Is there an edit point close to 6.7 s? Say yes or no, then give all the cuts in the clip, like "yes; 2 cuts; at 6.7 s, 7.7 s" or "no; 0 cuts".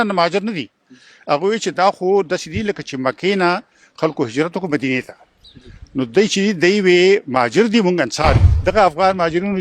no; 1 cut; at 8.5 s